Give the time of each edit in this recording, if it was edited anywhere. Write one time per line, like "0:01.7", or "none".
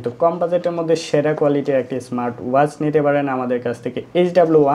none